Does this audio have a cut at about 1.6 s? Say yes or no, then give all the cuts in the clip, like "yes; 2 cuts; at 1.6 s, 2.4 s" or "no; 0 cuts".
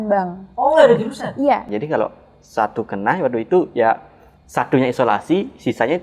yes; 1 cut; at 1.6 s